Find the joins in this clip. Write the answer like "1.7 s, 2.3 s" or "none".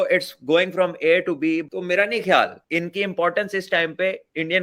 1.6 s, 2.6 s